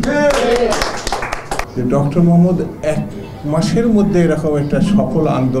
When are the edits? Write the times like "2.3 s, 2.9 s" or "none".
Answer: 1.6 s